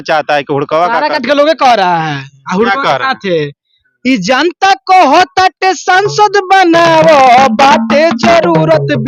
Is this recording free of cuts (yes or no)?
yes